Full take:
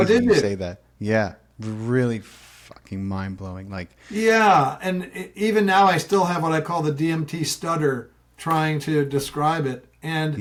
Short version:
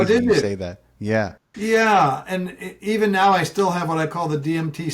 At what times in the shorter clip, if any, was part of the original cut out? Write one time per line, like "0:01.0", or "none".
0:01.4